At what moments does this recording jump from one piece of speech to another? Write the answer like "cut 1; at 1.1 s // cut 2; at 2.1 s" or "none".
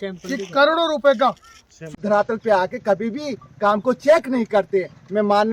cut 1; at 2.0 s